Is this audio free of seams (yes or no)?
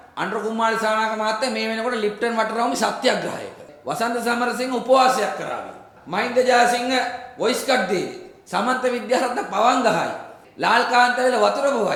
yes